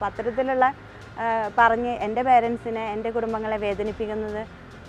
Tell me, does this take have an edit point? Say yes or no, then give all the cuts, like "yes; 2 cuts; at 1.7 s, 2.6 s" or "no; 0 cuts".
no; 0 cuts